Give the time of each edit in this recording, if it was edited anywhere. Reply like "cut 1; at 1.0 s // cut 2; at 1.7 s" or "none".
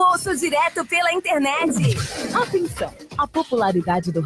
cut 1; at 2.0 s